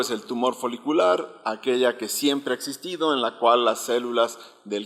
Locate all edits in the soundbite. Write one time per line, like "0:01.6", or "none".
none